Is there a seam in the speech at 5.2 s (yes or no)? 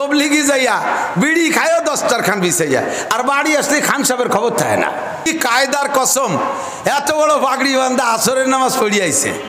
yes